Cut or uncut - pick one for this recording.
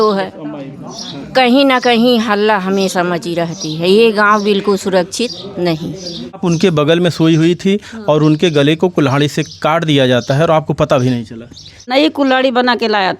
cut